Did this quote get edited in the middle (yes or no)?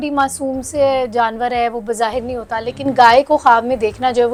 no